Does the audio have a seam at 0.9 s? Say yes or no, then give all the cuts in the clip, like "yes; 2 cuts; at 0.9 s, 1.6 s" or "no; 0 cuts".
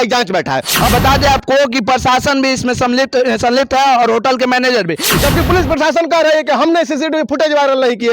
yes; 2 cuts; at 0.9 s, 5.1 s